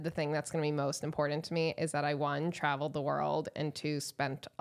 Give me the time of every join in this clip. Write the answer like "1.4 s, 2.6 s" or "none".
none

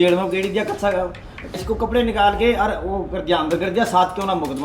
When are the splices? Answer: 1.8 s

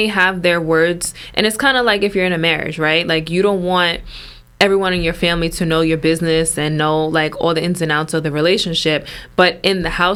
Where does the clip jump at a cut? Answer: none

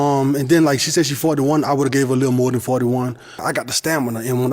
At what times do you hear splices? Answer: 3.4 s

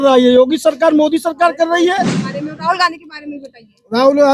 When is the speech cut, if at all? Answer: 2.2 s

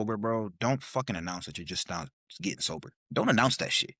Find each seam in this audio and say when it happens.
3.0 s

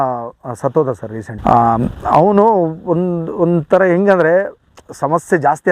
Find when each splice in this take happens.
none

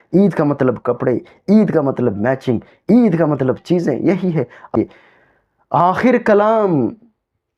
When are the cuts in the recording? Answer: 4.7 s

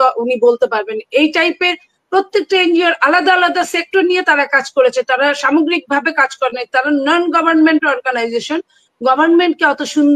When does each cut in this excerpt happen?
none

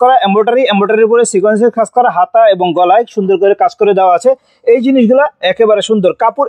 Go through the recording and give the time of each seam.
none

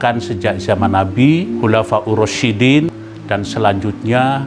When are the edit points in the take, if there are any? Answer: 1.5 s, 3.0 s

